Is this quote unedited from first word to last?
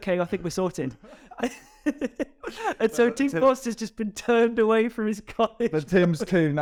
yes; 0 cuts

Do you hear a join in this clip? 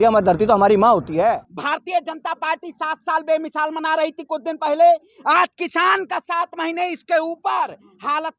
yes; 1 cut; at 1.5 s

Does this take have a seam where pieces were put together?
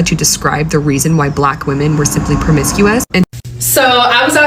yes; 1 cut; at 3.3 s

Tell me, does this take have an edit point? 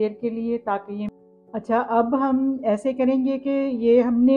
yes; 1 cut; at 1.1 s

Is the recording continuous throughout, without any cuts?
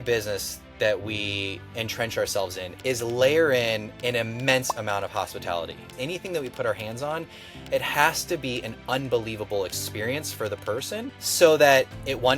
no; 4 cuts; at 2.7 s, 3.9 s, 5.9 s, 11.2 s

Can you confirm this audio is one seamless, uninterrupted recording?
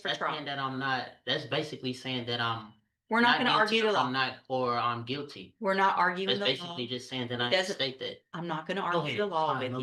yes; 0 cuts

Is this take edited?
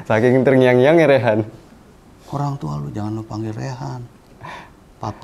no; 0 cuts

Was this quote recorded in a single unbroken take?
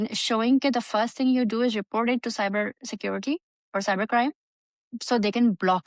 yes; 0 cuts

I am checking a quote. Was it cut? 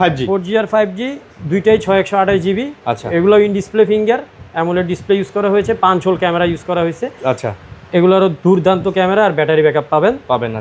no; 0 cuts

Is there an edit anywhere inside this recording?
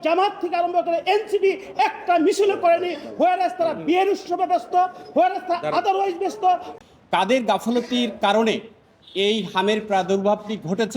yes; 1 cut; at 6.7 s

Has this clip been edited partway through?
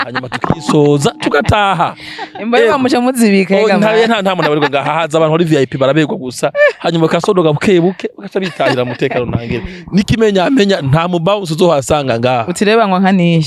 no; 0 cuts

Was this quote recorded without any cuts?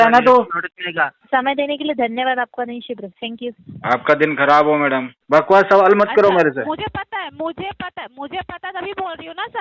no; 2 cuts; at 1.2 s, 5.1 s

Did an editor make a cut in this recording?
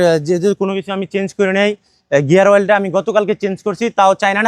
no; 0 cuts

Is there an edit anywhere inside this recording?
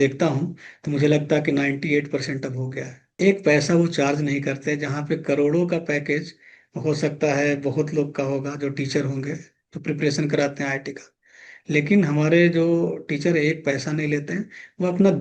yes; 1 cut; at 3.1 s

